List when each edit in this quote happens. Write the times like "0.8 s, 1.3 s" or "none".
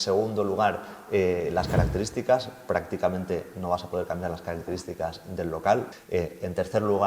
6.0 s